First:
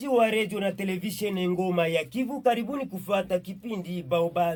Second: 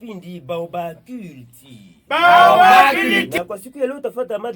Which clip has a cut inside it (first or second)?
second